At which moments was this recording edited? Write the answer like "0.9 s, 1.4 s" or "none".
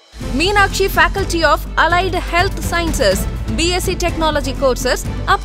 none